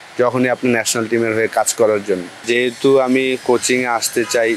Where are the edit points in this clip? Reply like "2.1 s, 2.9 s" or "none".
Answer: 2.4 s